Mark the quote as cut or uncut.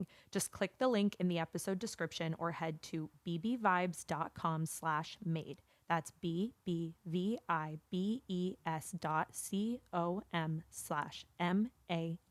uncut